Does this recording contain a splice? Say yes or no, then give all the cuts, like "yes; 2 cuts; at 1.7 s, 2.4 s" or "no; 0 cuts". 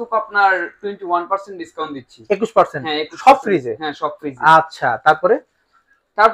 no; 0 cuts